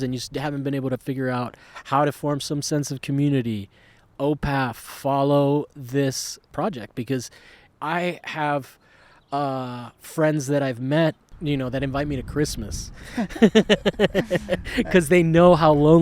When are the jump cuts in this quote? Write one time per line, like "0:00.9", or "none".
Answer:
0:06.5
0:07.6
0:11.2